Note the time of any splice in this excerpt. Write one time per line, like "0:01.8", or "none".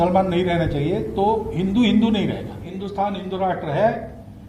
none